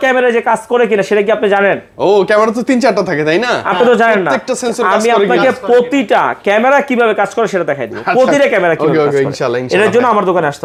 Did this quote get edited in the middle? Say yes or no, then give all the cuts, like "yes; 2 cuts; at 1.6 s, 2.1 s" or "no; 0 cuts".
no; 0 cuts